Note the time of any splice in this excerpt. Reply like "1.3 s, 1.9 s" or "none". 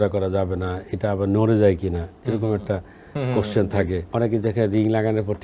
4.1 s